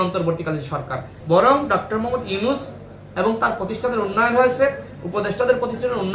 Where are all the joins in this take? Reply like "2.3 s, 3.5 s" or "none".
1.1 s

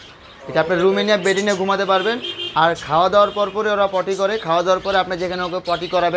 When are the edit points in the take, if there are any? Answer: none

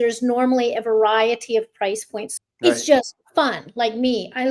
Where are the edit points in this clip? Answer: 2.2 s

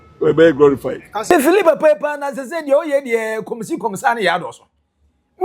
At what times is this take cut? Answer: 1.2 s

